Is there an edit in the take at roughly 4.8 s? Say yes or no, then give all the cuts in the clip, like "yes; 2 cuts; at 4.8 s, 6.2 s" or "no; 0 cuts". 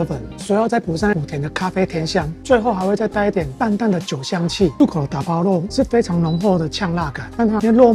yes; 1 cut; at 4.8 s